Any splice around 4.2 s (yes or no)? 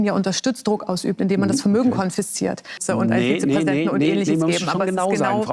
no